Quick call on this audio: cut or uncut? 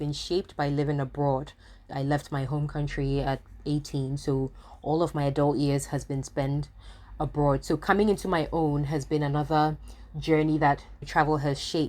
cut